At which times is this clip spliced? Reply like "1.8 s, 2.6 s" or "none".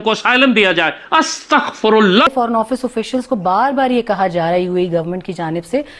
2.3 s